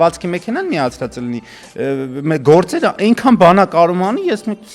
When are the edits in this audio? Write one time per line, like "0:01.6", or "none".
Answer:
none